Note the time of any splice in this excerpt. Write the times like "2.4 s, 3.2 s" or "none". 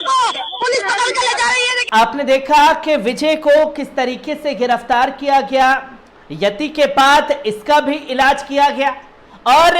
none